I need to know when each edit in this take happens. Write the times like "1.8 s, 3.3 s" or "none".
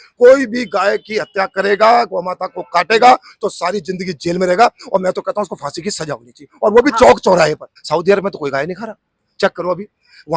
7.7 s